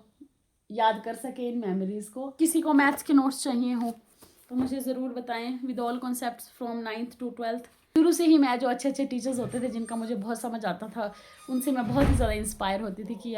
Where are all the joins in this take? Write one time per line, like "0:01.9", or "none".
0:02.3
0:07.8